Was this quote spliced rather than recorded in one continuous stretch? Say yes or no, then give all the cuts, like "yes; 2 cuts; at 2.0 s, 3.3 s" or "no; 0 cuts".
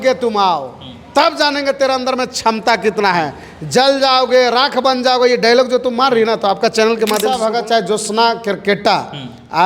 yes; 1 cut; at 7.3 s